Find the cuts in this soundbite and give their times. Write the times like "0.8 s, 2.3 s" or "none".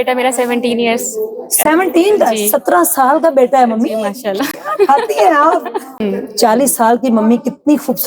5.8 s